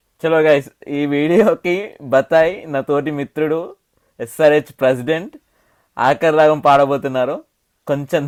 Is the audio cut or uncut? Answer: uncut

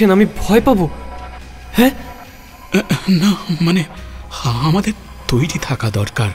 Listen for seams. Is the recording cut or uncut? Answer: cut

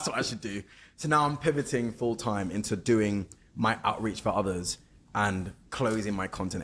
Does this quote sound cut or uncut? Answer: uncut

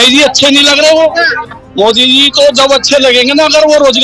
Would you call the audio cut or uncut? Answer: uncut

